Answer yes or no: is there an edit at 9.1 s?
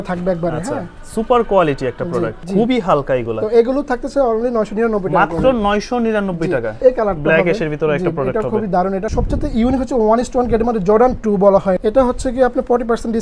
yes